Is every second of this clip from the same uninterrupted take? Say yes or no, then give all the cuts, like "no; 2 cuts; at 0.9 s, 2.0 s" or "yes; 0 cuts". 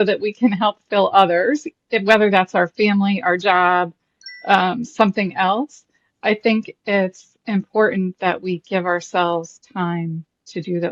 yes; 0 cuts